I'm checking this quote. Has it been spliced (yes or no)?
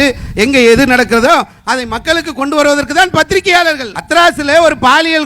yes